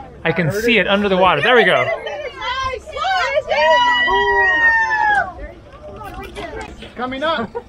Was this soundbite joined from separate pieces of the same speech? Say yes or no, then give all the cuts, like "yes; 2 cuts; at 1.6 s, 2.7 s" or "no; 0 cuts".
yes; 1 cut; at 6.6 s